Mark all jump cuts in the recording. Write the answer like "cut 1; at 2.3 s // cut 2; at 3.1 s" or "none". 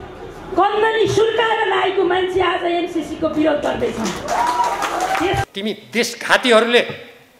cut 1; at 5.4 s